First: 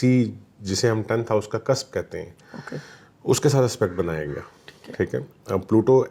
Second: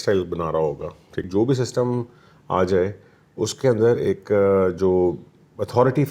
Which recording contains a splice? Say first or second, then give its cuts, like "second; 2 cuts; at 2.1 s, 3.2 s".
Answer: second; 1 cut; at 1.3 s